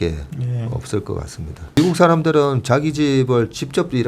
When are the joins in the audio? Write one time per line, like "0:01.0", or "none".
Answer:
0:01.8